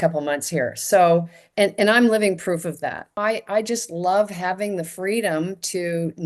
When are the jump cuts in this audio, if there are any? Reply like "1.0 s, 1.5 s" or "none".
3.1 s